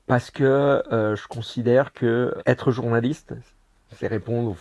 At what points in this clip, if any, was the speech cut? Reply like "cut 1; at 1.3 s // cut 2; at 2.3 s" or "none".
cut 1; at 2.4 s